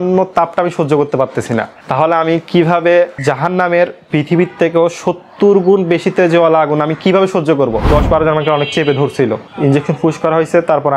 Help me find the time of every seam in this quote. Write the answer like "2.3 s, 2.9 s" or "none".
7.8 s